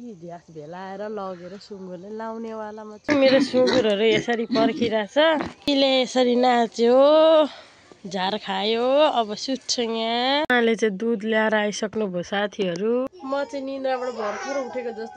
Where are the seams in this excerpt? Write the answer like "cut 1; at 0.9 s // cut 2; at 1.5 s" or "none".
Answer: cut 1; at 3.1 s // cut 2; at 5.6 s // cut 3; at 10.5 s // cut 4; at 13.1 s